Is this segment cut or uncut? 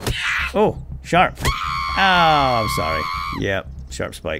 uncut